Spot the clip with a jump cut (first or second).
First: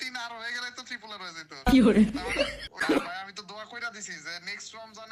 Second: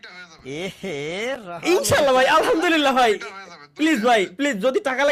first